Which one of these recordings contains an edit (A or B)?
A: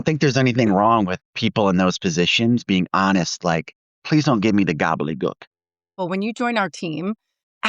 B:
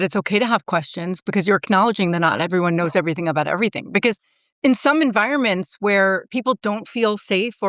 A